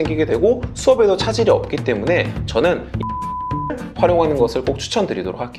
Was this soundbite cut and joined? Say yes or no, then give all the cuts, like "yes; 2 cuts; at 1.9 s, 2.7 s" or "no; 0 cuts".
no; 0 cuts